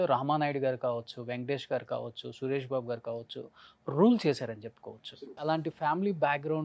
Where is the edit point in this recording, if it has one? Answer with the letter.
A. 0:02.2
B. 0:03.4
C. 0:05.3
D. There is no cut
C